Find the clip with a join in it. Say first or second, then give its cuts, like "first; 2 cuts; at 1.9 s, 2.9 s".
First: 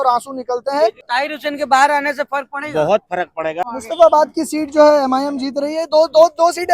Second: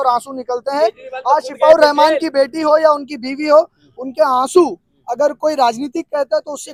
first; 2 cuts; at 1.0 s, 3.6 s